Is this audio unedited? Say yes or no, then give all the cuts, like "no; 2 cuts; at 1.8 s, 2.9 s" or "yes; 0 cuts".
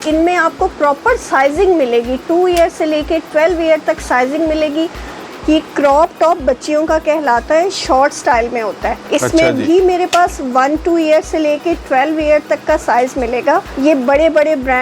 no; 3 cuts; at 5.3 s, 9.0 s, 13.7 s